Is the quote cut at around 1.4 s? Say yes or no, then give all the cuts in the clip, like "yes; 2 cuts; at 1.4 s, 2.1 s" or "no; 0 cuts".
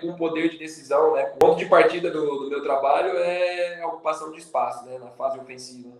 yes; 1 cut; at 1.4 s